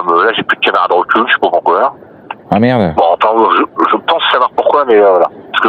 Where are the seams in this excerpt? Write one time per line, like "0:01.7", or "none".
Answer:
none